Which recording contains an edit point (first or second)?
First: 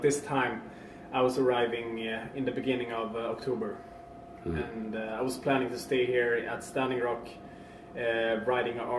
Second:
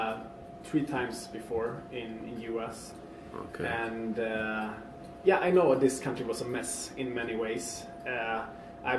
first